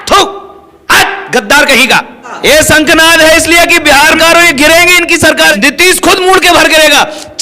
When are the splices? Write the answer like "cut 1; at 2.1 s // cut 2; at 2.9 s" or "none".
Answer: cut 1; at 2.3 s // cut 2; at 4.2 s // cut 3; at 5.5 s